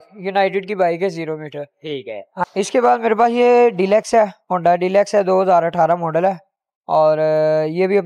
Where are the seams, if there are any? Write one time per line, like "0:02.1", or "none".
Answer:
0:02.3